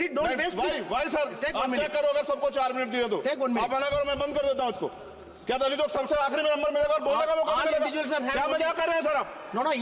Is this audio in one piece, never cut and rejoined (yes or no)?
yes